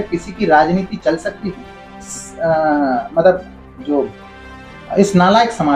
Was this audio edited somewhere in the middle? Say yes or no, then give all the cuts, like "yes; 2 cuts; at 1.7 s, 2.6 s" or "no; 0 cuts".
yes; 1 cut; at 2.1 s